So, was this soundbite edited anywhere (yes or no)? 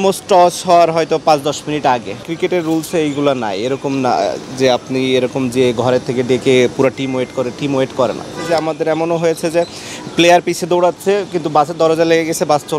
yes